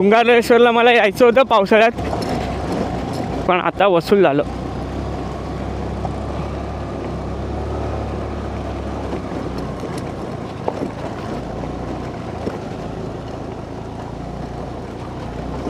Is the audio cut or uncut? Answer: uncut